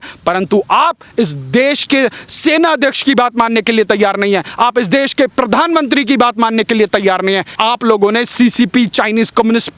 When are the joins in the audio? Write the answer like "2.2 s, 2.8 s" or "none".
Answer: 7.5 s